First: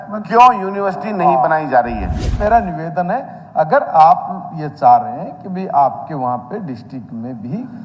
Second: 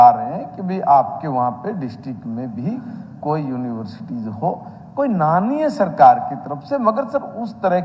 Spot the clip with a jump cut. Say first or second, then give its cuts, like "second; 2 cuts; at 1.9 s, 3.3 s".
first; 1 cut; at 2.3 s